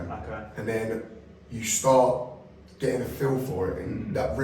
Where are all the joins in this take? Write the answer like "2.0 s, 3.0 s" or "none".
none